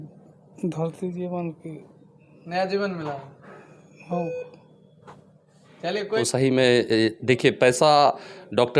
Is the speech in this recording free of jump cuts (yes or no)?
no